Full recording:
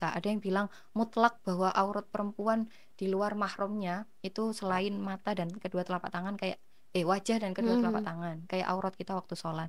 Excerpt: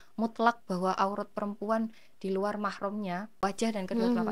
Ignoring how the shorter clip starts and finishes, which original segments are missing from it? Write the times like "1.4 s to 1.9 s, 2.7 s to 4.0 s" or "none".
4.2 s to 7.1 s